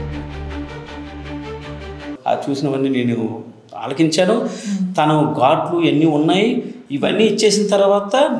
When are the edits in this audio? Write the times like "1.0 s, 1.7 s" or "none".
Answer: 2.1 s